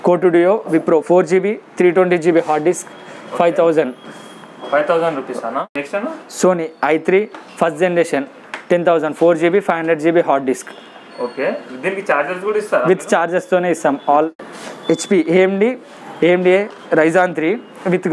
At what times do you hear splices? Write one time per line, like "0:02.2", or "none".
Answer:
0:05.6
0:14.4